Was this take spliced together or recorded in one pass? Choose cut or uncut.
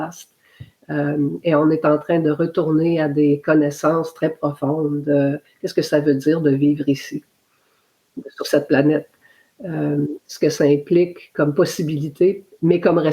uncut